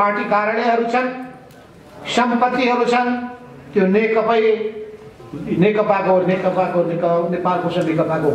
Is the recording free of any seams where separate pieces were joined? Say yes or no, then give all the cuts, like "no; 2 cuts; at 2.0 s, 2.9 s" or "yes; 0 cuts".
yes; 0 cuts